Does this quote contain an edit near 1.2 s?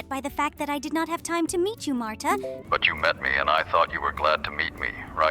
no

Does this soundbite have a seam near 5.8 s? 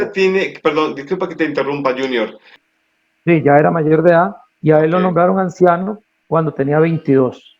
no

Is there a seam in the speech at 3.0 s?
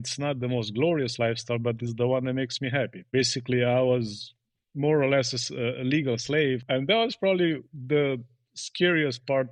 yes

